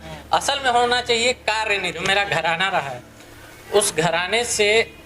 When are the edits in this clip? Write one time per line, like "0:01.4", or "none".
0:02.0

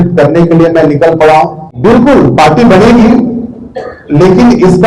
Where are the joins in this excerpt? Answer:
0:01.6

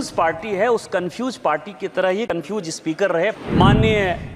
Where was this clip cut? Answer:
0:03.4

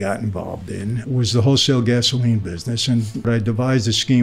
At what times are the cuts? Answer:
0:01.0
0:03.3

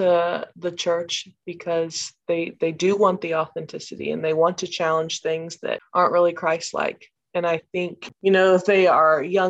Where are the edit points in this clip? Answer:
0:05.8
0:08.0

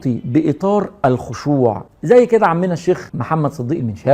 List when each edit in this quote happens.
0:01.9
0:03.1

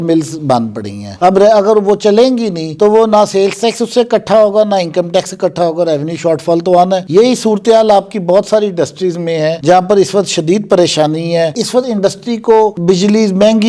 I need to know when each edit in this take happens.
none

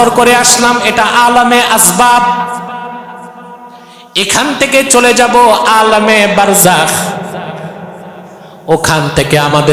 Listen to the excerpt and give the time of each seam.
none

